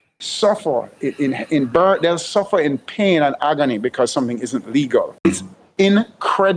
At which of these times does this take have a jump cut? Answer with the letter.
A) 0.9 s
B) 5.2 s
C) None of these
B